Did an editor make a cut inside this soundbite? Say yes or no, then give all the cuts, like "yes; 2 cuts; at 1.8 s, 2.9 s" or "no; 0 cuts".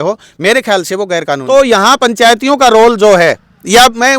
yes; 1 cut; at 1.4 s